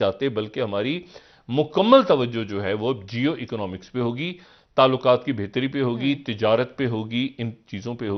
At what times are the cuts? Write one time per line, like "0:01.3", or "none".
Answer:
none